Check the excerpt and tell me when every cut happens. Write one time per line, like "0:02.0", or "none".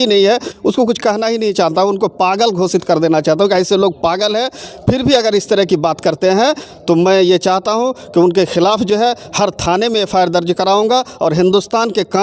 none